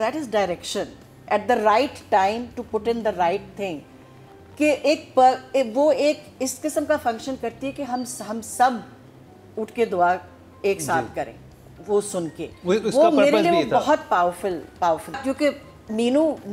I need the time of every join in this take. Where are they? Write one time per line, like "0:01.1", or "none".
0:15.2